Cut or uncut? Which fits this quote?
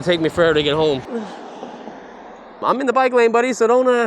cut